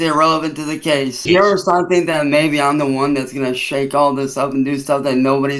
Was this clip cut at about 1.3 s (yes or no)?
yes